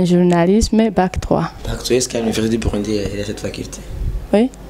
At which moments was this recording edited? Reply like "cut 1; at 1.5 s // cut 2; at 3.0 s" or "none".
none